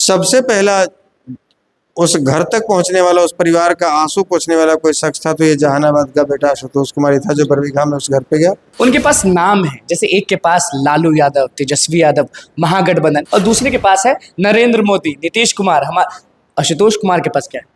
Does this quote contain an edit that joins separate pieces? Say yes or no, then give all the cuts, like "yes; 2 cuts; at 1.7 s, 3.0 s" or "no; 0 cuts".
yes; 2 cuts; at 8.7 s, 13.2 s